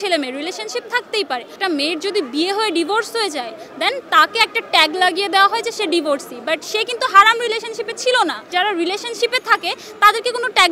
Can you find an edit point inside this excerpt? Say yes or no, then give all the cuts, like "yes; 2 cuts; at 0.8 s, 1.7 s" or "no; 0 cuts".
yes; 2 cuts; at 1.5 s, 8.5 s